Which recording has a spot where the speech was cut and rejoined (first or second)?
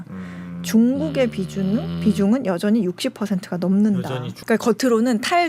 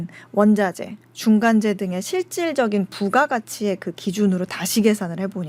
first